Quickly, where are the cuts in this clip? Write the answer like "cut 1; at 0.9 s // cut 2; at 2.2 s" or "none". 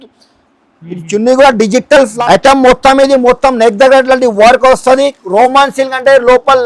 cut 1; at 2.1 s